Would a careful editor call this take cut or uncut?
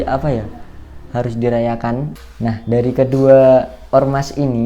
cut